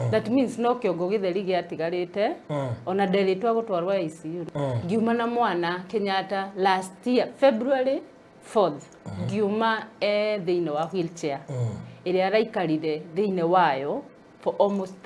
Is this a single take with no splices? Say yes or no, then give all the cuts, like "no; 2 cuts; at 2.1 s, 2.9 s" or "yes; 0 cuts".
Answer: no; 1 cut; at 4.4 s